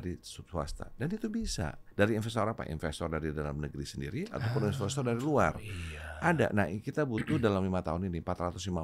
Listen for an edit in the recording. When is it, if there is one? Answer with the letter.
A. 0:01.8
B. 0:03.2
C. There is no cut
A